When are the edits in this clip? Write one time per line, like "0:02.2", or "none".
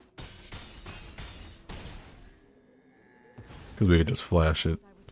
none